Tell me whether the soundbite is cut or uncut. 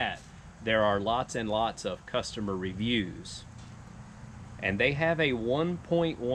uncut